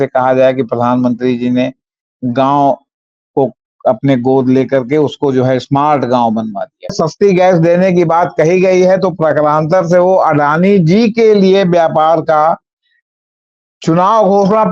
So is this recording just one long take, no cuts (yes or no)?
no